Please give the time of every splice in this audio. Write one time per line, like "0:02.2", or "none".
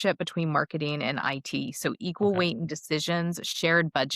none